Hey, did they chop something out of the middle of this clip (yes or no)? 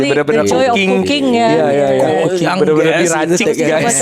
no